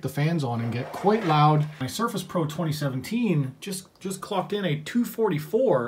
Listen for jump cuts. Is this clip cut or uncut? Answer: cut